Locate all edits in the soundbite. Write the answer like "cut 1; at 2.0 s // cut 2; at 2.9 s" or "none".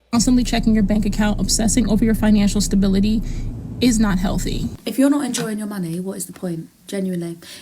cut 1; at 4.7 s